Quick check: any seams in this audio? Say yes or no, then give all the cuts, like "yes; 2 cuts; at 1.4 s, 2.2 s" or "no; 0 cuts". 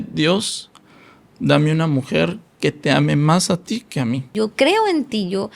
yes; 1 cut; at 4.3 s